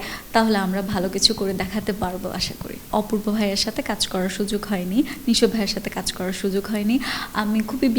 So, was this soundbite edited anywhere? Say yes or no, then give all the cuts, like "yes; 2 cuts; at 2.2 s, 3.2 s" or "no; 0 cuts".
yes; 1 cut; at 2.9 s